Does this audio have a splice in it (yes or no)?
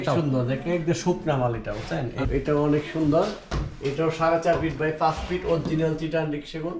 yes